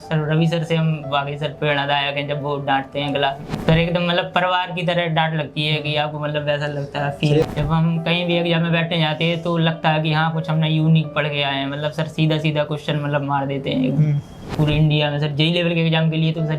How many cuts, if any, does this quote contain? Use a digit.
3